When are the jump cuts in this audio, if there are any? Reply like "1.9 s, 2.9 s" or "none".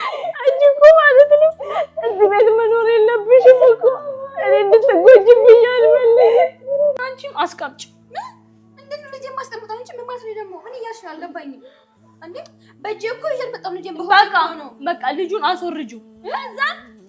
7.0 s